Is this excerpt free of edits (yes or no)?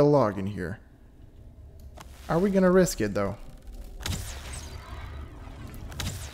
yes